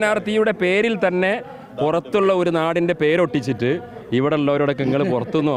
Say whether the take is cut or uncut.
uncut